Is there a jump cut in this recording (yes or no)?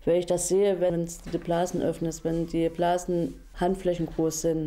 yes